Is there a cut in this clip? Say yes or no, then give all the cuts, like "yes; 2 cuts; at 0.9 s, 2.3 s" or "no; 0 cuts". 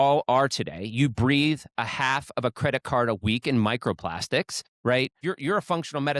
yes; 1 cut; at 5.2 s